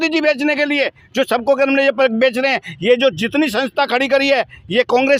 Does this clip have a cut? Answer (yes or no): no